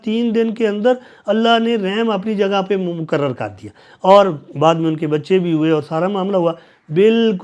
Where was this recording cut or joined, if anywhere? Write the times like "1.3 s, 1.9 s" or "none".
none

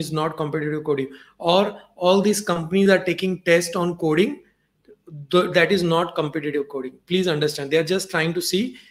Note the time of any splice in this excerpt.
none

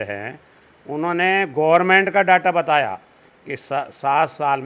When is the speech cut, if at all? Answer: none

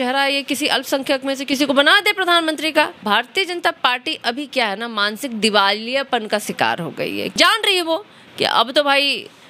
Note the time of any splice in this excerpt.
3.0 s, 7.4 s

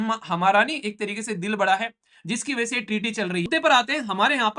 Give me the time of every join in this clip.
3.5 s

